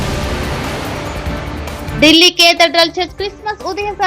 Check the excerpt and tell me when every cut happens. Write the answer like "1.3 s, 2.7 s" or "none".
1.9 s